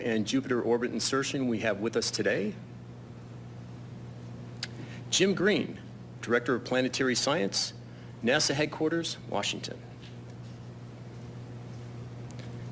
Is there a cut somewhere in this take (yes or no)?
yes